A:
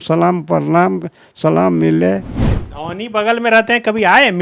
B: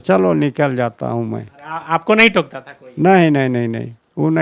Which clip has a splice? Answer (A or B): A